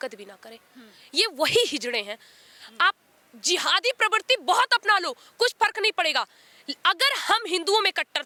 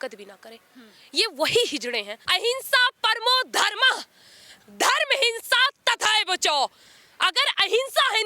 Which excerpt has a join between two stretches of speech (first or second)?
second